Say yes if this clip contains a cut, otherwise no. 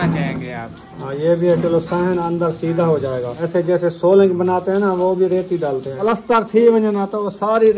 yes